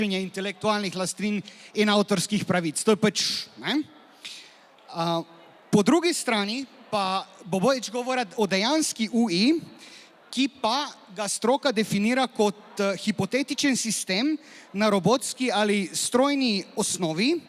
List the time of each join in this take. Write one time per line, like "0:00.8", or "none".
none